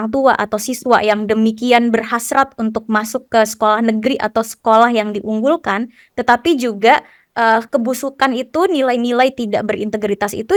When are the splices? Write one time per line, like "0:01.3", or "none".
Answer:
none